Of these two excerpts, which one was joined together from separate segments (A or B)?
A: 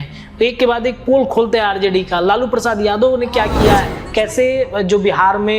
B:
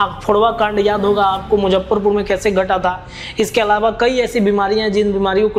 A